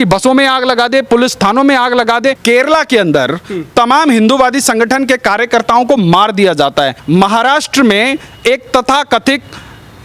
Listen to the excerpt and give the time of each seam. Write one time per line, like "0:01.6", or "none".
0:02.4
0:07.0